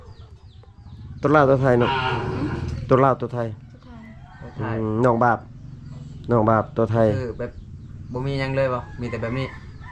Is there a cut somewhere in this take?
no; 0 cuts

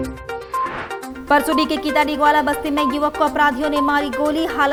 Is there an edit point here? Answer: no; 0 cuts

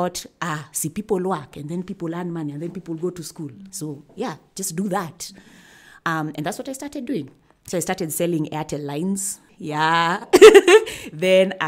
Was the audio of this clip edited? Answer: no; 0 cuts

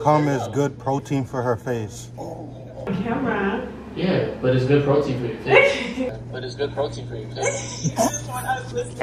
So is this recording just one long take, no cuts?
yes; 0 cuts

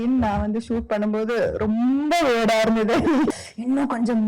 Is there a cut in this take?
yes; 1 cut; at 3.3 s

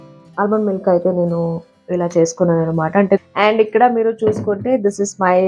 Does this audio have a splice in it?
yes; 1 cut; at 3.2 s

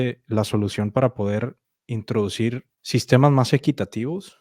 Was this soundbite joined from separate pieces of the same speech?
yes; 1 cut; at 2.7 s

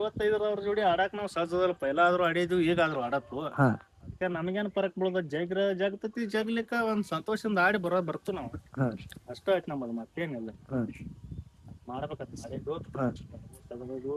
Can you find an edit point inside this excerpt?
no; 0 cuts

